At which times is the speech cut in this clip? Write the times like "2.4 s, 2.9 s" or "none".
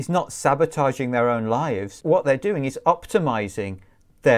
2.0 s